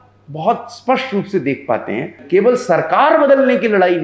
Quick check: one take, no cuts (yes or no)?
no